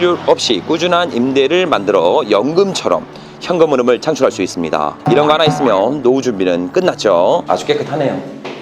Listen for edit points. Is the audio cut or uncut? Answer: cut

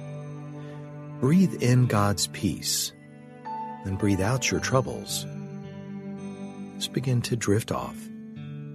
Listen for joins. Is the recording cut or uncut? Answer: cut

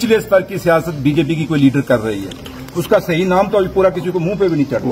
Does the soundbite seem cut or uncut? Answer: uncut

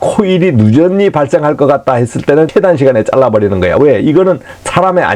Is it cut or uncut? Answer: cut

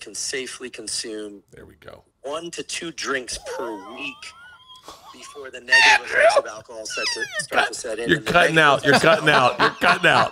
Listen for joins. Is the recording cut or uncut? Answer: uncut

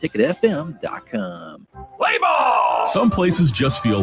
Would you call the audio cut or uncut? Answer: cut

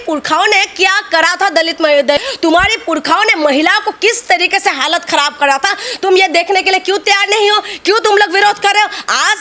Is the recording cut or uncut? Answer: uncut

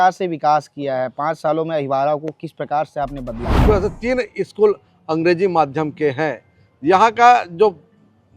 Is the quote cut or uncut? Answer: cut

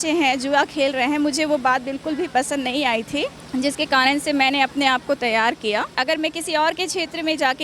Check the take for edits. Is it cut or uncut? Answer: cut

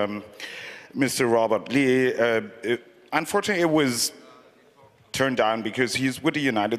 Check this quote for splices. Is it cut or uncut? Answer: uncut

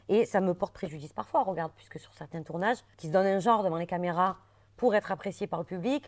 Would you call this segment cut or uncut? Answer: cut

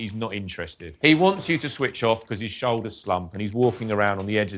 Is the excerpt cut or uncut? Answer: cut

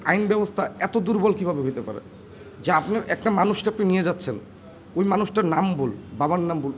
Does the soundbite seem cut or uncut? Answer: uncut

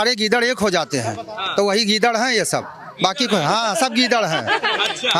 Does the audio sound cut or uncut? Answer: uncut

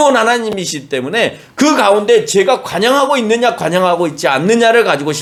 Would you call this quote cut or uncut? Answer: uncut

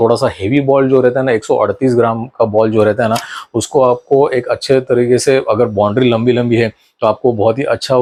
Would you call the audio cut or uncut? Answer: uncut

